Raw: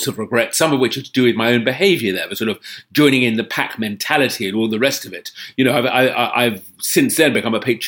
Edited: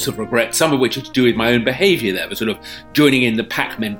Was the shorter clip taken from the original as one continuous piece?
yes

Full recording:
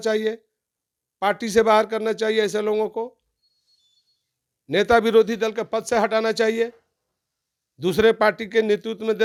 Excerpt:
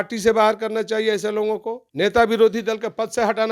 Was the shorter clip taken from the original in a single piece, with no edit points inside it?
no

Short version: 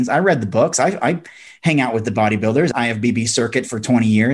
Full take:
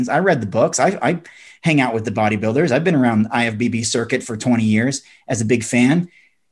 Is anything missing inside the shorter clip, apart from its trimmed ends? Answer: yes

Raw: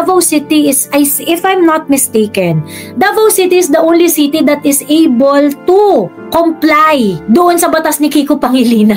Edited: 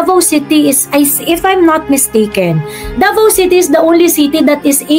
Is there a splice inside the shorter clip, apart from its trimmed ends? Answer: no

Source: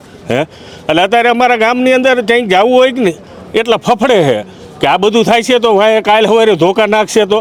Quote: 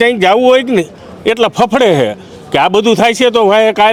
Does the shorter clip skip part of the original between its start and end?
no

